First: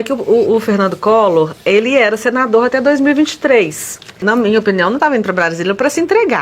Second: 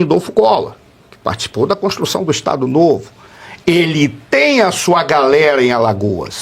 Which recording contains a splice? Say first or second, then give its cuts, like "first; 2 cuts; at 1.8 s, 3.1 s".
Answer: first; 1 cut; at 4.2 s